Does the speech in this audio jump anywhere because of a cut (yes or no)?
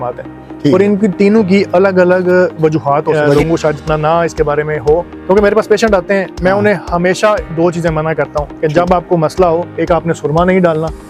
yes